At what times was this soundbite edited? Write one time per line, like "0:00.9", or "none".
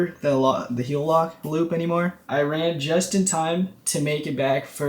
0:02.2